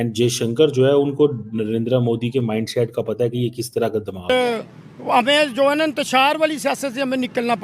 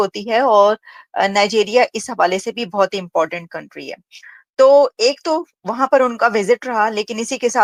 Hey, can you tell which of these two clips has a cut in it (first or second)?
first